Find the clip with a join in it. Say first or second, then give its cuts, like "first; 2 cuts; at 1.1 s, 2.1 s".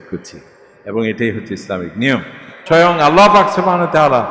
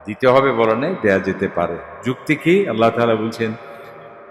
first; 1 cut; at 2.6 s